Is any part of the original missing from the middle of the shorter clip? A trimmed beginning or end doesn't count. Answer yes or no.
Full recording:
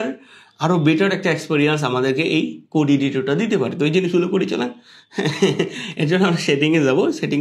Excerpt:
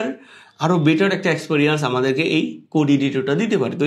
no